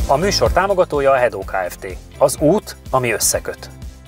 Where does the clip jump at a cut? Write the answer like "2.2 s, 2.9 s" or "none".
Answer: none

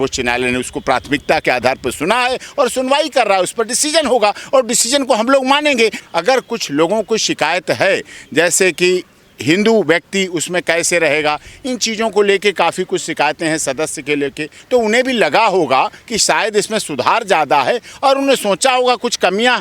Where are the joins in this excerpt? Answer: 6.0 s, 14.5 s

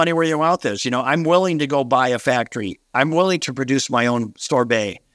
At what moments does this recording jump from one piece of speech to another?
none

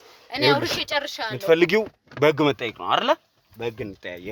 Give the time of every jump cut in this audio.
none

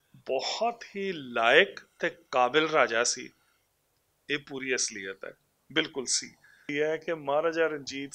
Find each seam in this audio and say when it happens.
6.7 s

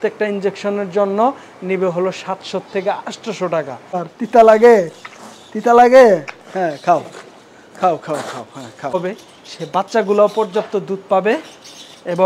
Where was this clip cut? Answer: 4.0 s, 8.9 s

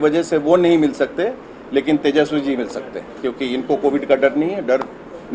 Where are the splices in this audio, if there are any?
none

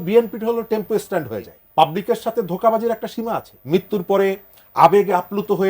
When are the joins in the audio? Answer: 1.6 s, 3.5 s

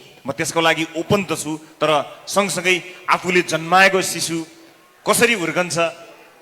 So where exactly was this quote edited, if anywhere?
none

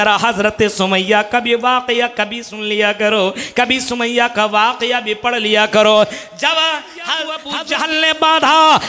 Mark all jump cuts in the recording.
7.5 s

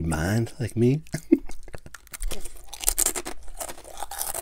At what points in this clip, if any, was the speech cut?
none

